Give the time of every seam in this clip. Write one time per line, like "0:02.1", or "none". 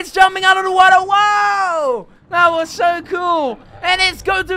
0:02.2